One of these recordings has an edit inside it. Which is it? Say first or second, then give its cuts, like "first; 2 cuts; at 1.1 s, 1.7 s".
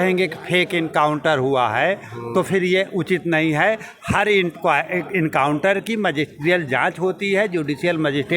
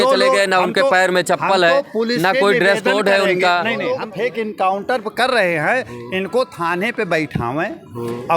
second; 1 cut; at 4.0 s